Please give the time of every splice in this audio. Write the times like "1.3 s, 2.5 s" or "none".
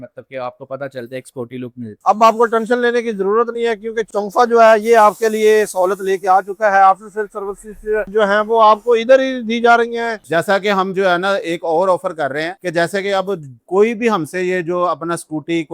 2.0 s, 10.2 s